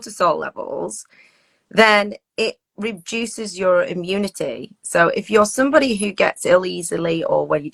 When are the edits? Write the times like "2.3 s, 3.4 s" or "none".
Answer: none

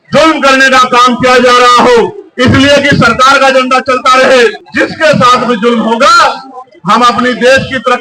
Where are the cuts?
4.6 s

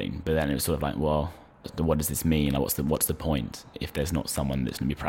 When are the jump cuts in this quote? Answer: 1.7 s, 3.8 s

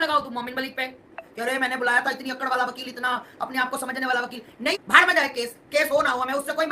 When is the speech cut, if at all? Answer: 1.3 s, 4.7 s

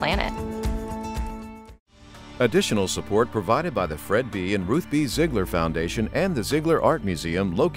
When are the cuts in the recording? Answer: 2.2 s

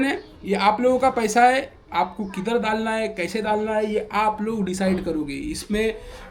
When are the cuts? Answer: none

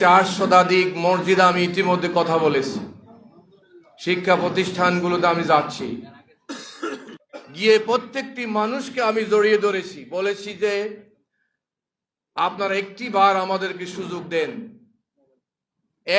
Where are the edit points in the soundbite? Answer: 7.0 s

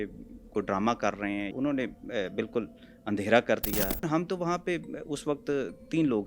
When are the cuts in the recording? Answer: 1.5 s, 4.1 s

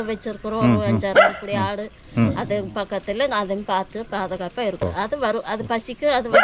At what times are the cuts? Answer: 5.0 s

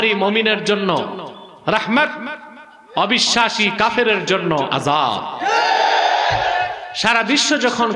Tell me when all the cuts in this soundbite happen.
6.9 s

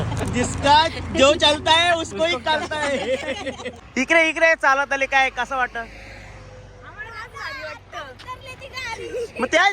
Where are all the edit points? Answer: 3.7 s

